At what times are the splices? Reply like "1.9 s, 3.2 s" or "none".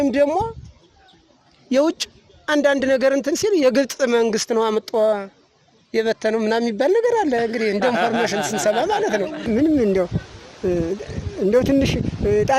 9.4 s